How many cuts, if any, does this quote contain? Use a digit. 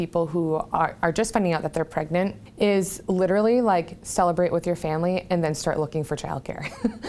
1